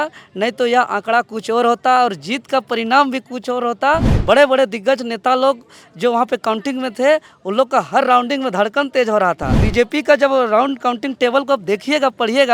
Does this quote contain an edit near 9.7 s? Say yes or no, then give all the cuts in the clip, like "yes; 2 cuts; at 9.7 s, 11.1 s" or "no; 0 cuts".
yes; 2 cuts; at 4.1 s, 9.7 s